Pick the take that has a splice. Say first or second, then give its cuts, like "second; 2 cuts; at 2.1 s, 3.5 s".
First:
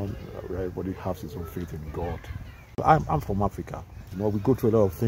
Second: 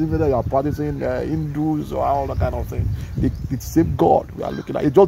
first; 2 cuts; at 2.8 s, 4.1 s